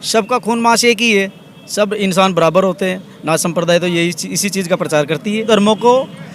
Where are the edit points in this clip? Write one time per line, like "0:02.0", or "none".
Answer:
0:05.4